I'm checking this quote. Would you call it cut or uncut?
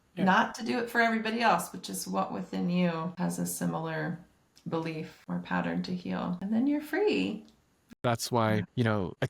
cut